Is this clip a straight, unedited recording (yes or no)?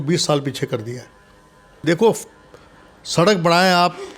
no